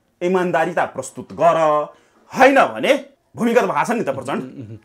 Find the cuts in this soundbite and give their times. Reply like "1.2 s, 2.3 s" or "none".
3.2 s